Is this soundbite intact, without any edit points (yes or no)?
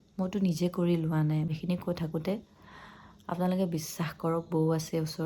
no